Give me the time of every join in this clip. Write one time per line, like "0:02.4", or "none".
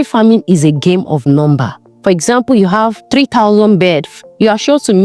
0:02.0
0:03.0
0:04.1